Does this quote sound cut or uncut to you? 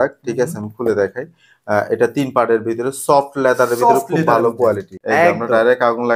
cut